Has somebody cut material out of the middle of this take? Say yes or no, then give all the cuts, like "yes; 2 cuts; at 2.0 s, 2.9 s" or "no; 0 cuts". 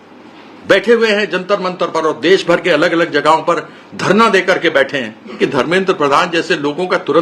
yes; 1 cut; at 5.3 s